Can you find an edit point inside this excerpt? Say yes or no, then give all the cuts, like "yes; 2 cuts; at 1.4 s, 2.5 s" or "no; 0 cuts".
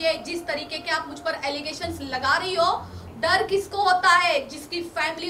yes; 1 cut; at 3.0 s